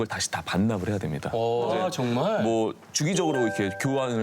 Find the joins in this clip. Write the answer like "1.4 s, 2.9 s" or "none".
1.7 s